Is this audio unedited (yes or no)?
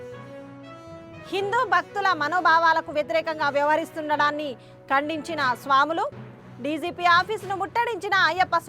yes